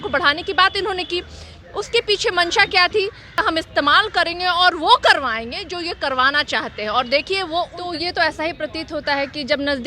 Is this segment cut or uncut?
cut